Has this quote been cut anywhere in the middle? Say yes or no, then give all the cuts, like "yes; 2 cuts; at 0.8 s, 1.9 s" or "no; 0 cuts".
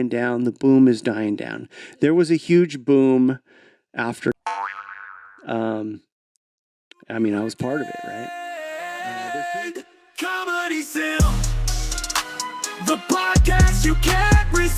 yes; 1 cut; at 8.1 s